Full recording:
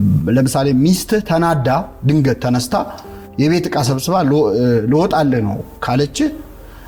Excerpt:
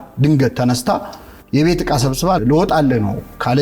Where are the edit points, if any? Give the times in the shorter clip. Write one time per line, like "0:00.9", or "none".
0:02.4

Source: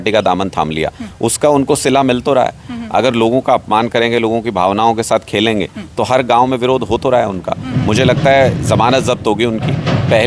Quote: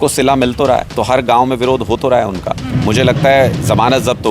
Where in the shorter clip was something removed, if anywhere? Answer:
0:00.9

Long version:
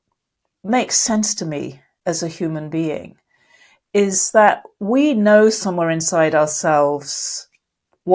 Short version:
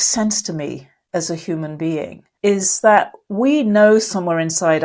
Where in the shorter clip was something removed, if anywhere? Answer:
0:02.2

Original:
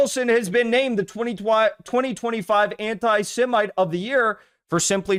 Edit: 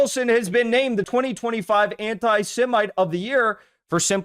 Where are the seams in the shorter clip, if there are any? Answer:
0:01.1

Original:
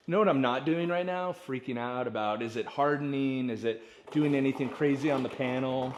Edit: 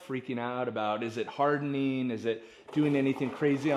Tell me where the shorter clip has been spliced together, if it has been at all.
none

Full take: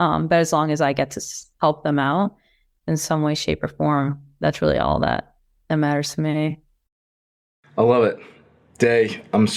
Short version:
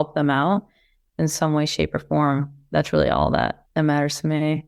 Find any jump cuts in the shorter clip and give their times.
0:03.6

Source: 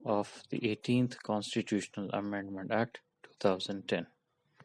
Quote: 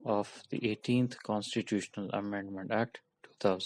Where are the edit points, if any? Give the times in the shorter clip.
none

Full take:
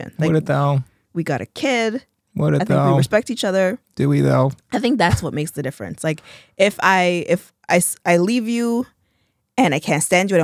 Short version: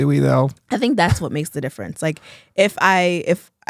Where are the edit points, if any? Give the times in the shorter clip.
none

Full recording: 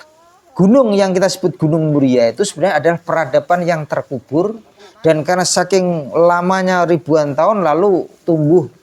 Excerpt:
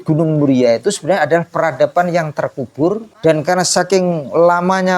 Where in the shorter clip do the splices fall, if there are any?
0:03.1

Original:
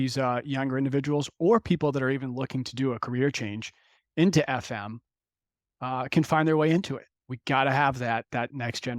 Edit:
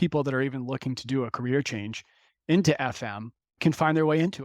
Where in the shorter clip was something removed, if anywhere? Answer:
0:03.6

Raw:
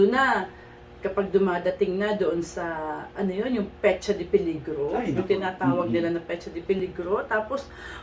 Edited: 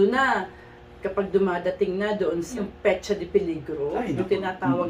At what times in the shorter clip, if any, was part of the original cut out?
0:02.5

